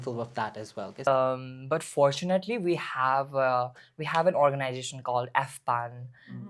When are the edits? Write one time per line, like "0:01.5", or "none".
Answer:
0:01.1